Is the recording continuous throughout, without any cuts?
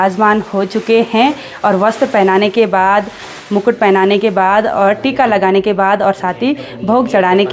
yes; 0 cuts

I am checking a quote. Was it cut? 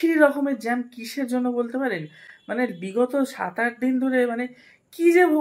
no; 0 cuts

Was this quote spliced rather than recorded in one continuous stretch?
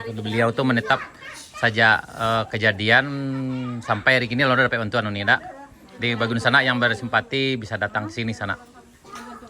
no; 0 cuts

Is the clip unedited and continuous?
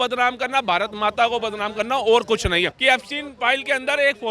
no; 1 cut; at 2.7 s

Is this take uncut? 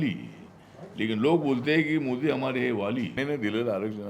no; 1 cut; at 3.1 s

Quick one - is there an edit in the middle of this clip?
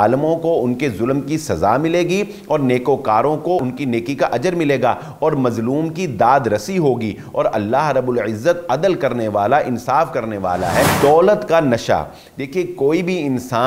yes; 2 cuts; at 3.6 s, 10.9 s

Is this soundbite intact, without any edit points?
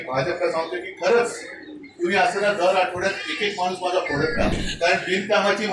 no; 1 cut; at 4.5 s

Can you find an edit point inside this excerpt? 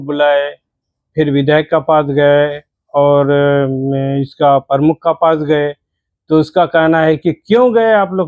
no; 0 cuts

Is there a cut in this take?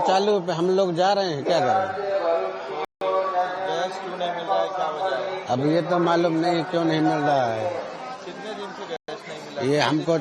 no; 0 cuts

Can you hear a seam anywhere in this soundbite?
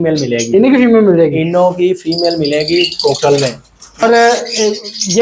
yes; 1 cut; at 4.0 s

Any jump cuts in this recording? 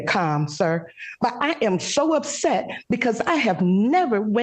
no; 0 cuts

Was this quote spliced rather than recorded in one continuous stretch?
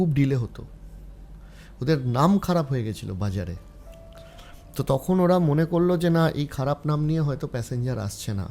no; 0 cuts

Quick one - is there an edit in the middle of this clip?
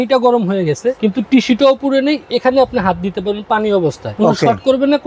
yes; 2 cuts; at 1.0 s, 4.0 s

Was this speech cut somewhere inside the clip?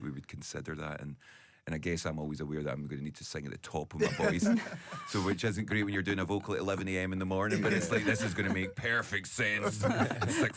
no; 0 cuts

